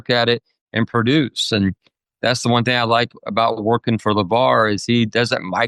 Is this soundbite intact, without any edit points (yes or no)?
yes